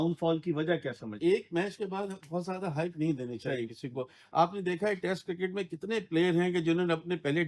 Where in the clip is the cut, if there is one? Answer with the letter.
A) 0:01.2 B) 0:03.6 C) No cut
A